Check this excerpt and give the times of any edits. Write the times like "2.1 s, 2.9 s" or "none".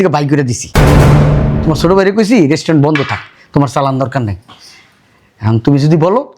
none